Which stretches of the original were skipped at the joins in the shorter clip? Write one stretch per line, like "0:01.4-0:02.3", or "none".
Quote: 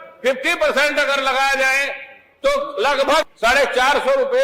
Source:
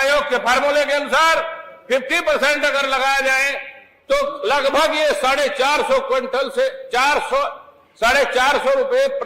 0:04.9-0:07.9